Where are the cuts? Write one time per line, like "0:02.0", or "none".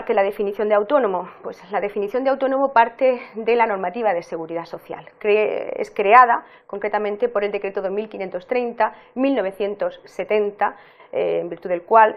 none